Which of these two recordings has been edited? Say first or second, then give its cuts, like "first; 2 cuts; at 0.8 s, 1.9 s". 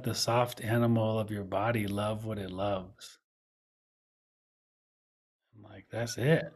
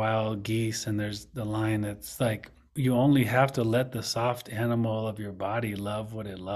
second; 1 cut; at 2.8 s